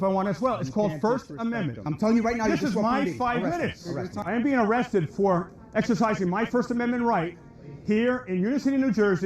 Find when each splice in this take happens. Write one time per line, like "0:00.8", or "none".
0:01.9
0:04.2